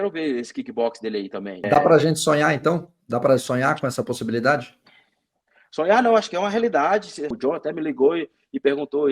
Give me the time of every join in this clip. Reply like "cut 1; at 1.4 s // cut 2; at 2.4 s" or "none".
cut 1; at 1.6 s // cut 2; at 7.4 s